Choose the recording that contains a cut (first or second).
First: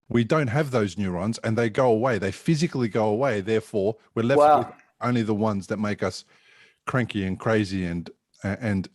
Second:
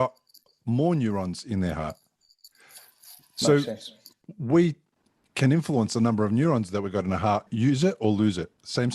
second